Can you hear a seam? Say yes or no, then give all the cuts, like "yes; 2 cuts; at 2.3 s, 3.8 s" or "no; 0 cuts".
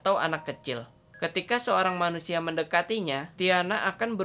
yes; 1 cut; at 1.1 s